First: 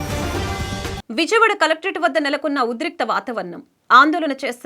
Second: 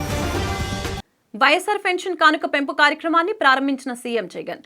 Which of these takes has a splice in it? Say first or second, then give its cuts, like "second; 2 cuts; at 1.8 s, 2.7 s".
first; 1 cut; at 1.0 s